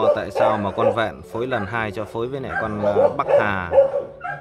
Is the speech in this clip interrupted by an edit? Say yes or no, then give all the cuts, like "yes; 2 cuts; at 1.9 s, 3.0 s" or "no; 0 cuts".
no; 0 cuts